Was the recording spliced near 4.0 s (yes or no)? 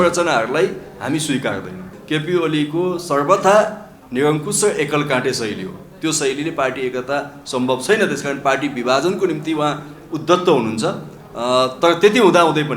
no